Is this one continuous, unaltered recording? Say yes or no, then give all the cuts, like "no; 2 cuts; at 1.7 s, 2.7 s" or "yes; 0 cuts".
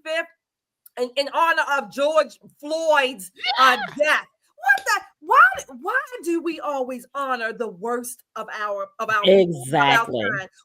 yes; 0 cuts